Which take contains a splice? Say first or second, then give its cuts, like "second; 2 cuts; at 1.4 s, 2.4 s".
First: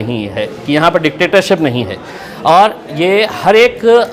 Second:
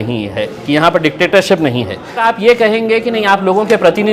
second; 1 cut; at 2.2 s